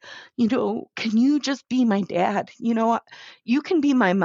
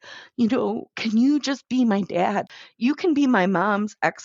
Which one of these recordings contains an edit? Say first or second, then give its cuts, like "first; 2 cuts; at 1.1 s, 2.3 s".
second; 1 cut; at 2.5 s